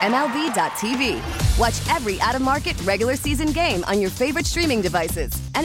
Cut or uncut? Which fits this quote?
uncut